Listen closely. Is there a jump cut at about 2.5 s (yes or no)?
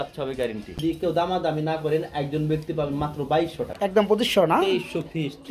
no